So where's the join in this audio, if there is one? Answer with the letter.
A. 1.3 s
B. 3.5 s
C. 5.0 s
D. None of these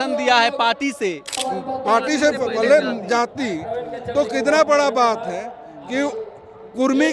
A